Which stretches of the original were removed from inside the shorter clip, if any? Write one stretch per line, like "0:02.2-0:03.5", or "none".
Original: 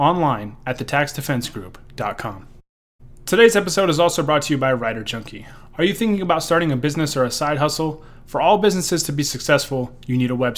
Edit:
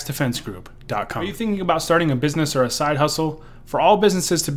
0:02.4-0:05.9